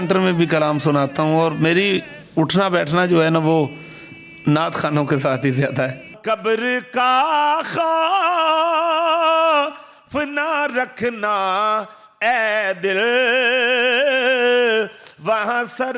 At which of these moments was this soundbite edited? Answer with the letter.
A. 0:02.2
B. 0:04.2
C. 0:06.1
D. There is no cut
C